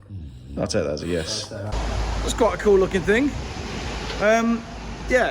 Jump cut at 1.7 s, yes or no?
yes